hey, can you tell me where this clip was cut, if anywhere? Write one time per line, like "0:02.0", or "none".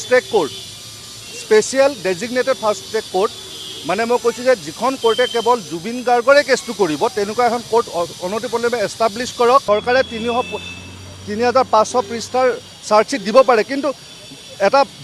0:09.6

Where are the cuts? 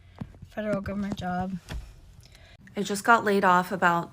0:02.6

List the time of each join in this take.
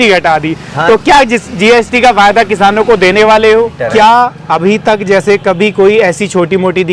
0:03.8

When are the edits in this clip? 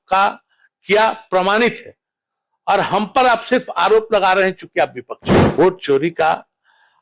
0:05.5

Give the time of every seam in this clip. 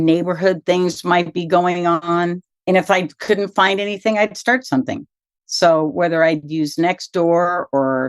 0:02.5

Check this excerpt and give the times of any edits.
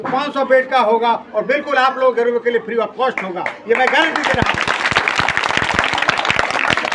none

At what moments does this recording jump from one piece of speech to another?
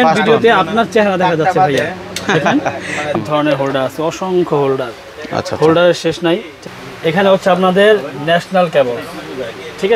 0:03.2
0:06.6

